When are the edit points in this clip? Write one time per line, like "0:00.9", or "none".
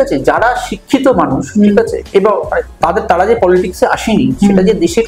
none